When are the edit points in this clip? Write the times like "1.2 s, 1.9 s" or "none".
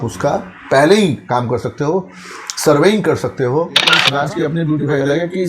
4.0 s